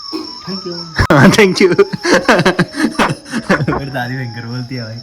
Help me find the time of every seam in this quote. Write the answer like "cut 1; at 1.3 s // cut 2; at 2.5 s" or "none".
none